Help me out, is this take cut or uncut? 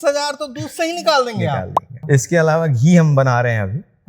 cut